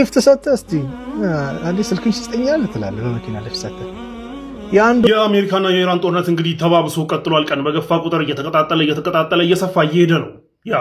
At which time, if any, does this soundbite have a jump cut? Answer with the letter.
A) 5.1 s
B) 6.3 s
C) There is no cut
A